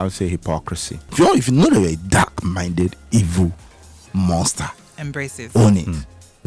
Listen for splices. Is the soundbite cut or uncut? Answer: cut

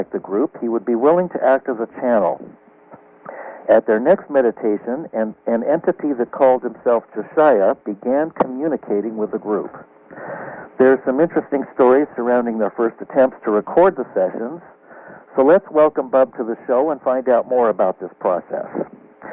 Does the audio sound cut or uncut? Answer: uncut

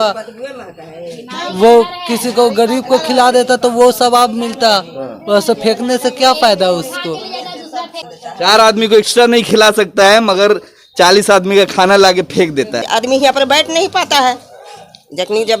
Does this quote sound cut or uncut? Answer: cut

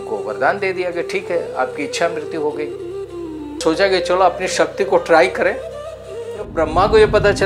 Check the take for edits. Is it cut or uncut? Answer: cut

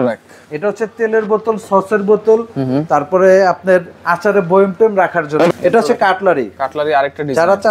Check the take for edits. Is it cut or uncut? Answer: cut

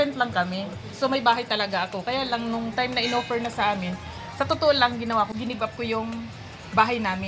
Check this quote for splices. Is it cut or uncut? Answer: uncut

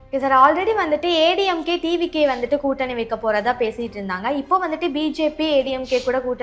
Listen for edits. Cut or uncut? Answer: uncut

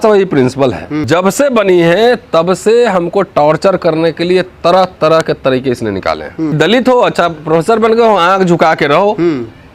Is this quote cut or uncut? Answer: cut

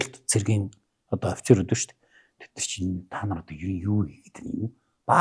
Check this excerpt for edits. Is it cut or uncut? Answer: uncut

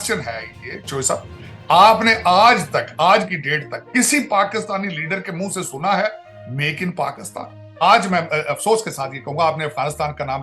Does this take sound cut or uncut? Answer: cut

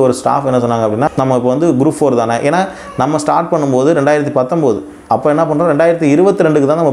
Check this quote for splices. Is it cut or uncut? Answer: cut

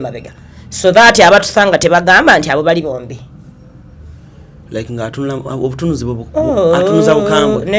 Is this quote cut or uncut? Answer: uncut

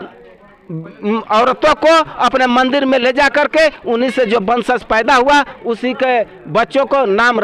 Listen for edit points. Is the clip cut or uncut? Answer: uncut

